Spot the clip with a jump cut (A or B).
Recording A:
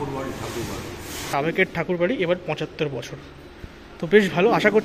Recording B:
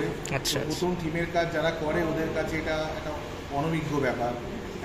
A